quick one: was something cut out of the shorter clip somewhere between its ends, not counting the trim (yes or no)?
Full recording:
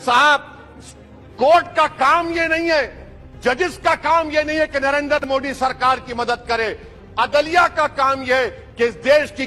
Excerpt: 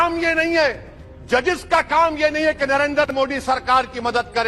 no